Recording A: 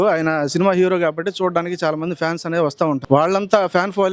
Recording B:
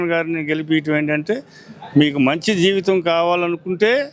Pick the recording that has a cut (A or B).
A